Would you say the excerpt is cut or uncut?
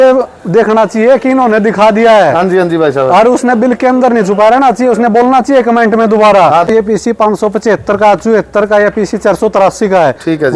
cut